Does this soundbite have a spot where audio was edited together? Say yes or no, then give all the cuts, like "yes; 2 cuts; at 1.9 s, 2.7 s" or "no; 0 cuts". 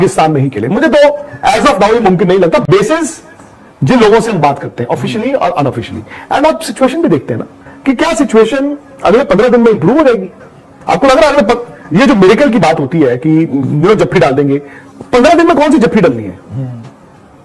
no; 0 cuts